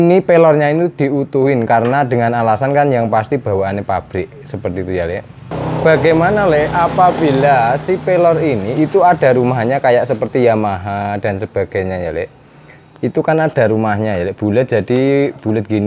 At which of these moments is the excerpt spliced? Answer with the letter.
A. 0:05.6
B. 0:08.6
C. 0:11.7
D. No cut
A